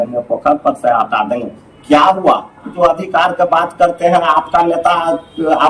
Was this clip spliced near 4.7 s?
no; 1 cut; at 2.7 s

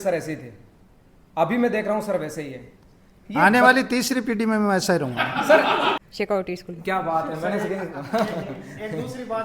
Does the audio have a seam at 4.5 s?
no; 1 cut; at 6.0 s

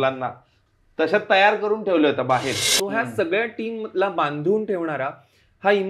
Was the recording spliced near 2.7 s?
yes; 1 cut; at 2.7 s

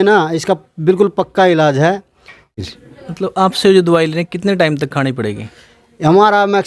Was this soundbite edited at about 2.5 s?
yes; 1 cut; at 2.5 s

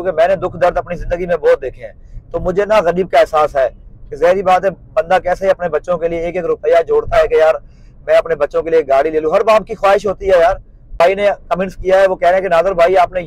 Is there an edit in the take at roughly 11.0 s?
yes; 1 cut; at 11.0 s

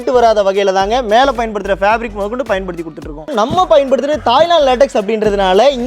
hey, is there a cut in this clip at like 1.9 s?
no; 1 cut; at 3.3 s

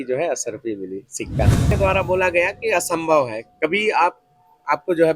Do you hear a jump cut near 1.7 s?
yes; 1 cut; at 1.7 s

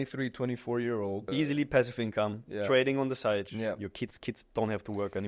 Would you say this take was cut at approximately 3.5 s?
yes; 2 cuts; at 1.3 s, 3.5 s

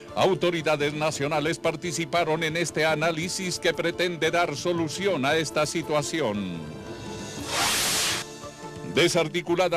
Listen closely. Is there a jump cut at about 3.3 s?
yes; 1 cut; at 3.3 s

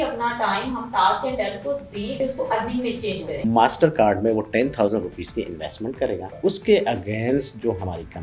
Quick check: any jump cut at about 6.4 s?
yes; 3 cuts; at 2.2 s, 3.4 s, 6.4 s

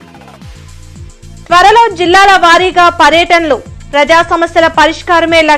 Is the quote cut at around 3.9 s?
no; 1 cut; at 1.3 s

